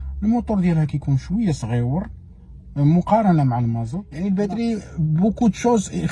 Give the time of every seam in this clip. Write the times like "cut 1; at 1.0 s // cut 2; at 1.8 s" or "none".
cut 1; at 4.0 s